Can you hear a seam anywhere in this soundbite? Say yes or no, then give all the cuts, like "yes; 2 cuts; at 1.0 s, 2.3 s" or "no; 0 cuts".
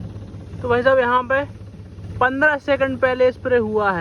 no; 0 cuts